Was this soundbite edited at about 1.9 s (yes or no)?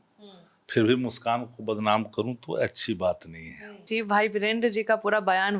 no